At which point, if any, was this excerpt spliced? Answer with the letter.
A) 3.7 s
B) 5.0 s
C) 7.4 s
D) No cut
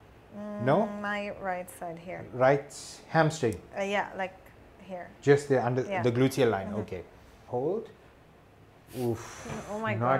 C